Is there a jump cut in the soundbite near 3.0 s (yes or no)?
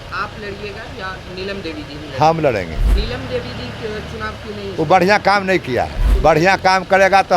yes